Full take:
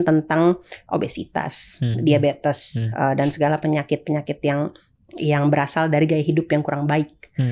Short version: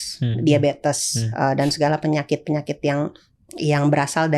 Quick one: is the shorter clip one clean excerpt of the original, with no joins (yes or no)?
yes